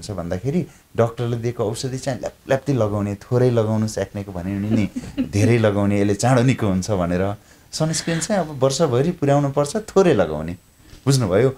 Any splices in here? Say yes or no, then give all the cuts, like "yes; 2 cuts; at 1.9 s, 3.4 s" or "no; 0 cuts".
no; 0 cuts